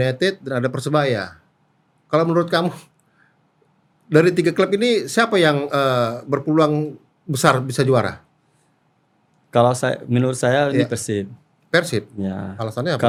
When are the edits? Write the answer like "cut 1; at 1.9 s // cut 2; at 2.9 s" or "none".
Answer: none